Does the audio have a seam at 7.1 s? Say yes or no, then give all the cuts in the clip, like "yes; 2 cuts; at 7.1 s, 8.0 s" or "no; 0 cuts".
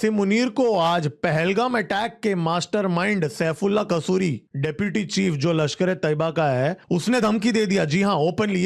no; 0 cuts